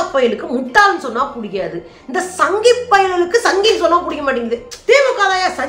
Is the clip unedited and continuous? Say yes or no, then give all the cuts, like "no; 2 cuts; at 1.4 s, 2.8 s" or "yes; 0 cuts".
no; 1 cut; at 4.7 s